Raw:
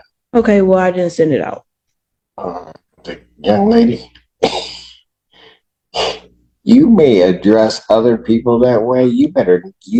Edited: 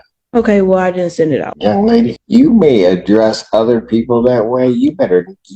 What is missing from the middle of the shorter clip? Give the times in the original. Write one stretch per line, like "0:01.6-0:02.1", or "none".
0:01.5-0:03.3
0:04.0-0:06.6